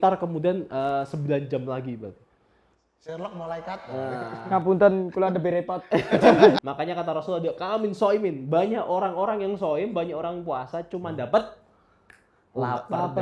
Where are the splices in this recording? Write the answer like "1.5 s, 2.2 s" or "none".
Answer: 6.6 s